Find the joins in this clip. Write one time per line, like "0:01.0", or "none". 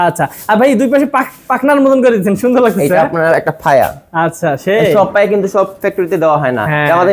none